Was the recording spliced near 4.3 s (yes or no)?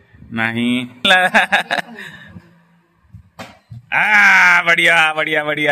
no